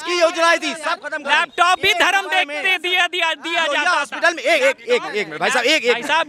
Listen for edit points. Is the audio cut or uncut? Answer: uncut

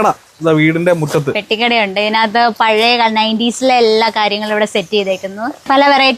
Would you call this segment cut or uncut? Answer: uncut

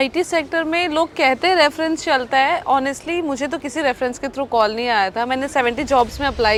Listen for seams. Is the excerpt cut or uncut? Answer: uncut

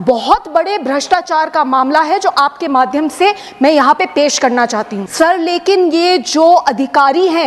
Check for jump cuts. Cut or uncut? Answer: cut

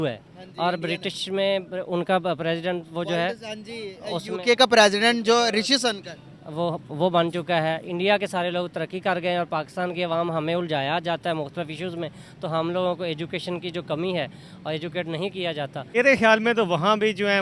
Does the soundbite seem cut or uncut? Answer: cut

